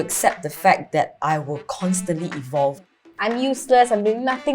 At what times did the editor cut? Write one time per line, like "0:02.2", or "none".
0:02.9